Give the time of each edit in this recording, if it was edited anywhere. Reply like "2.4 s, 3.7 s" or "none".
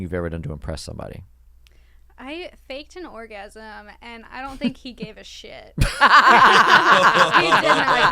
none